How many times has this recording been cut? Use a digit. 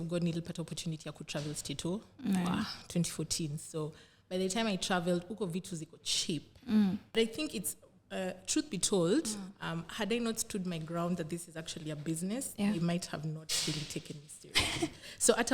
1